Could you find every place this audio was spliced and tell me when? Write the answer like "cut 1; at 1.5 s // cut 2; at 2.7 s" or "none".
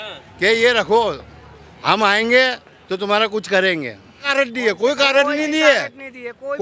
cut 1; at 4.3 s